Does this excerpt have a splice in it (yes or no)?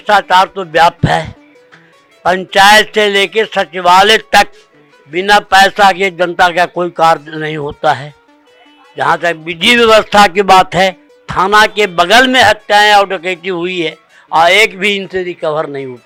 no